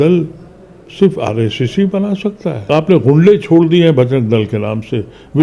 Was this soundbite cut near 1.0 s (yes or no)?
no